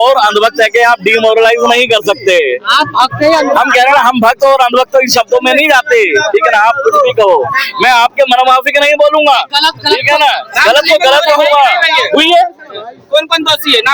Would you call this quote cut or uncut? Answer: uncut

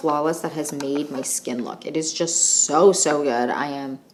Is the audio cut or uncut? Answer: uncut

